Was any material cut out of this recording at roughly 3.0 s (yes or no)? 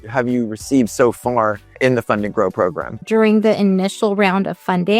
yes